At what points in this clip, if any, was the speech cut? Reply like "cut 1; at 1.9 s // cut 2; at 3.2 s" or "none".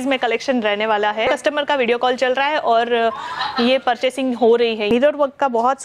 cut 1; at 1.3 s // cut 2; at 4.9 s